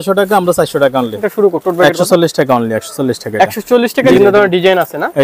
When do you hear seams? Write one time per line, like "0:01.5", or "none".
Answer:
0:01.3
0:04.1